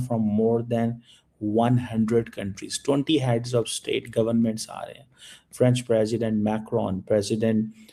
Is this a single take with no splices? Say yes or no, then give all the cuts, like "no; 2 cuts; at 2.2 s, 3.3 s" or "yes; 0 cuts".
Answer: yes; 0 cuts